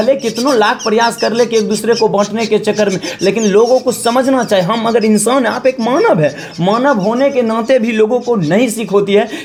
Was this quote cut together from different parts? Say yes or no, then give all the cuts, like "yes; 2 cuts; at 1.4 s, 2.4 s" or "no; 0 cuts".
no; 0 cuts